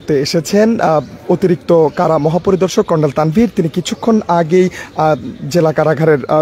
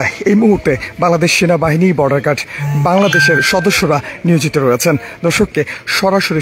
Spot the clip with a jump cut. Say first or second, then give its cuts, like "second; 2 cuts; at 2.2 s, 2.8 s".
second; 1 cut; at 5.5 s